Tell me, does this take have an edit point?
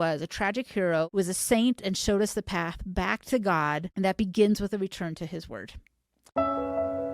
yes; 3 cuts; at 1.1 s, 3.9 s, 6.2 s

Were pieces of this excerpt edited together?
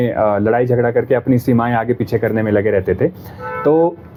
no; 0 cuts

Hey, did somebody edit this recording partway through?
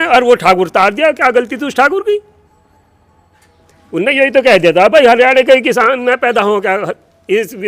no; 0 cuts

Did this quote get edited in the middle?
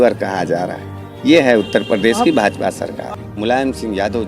yes; 1 cut; at 3.0 s

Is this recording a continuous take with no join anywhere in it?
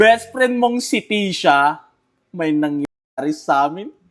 yes; 0 cuts

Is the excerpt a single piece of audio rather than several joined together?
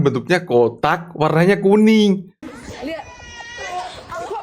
no; 1 cut; at 2.4 s

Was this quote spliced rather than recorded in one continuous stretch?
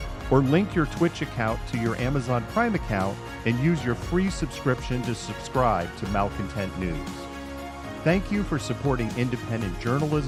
no; 0 cuts

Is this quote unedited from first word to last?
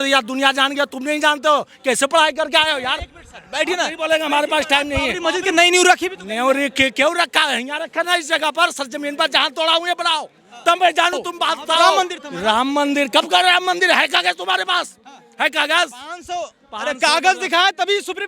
no; 2 cuts; at 5.1 s, 11.9 s

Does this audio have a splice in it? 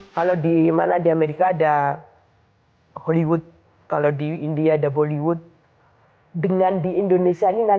no; 0 cuts

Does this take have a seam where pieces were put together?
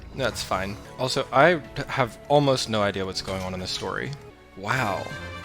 yes; 2 cuts; at 0.8 s, 4.3 s

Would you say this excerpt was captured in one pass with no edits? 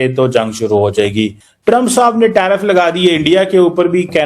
no; 1 cut; at 1.3 s

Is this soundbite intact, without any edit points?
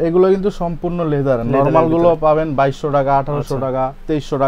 yes; 0 cuts

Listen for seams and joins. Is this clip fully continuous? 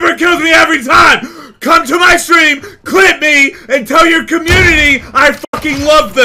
yes; 0 cuts

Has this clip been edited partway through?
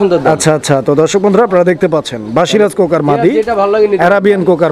no; 0 cuts

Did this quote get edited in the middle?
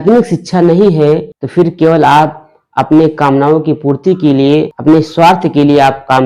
yes; 2 cuts; at 1.4 s, 4.7 s

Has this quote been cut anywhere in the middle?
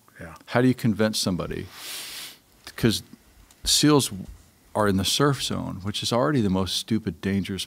no; 0 cuts

